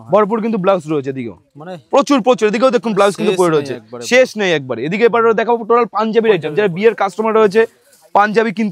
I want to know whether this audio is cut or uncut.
uncut